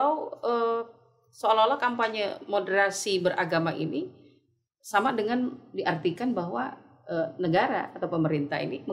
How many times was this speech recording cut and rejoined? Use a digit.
0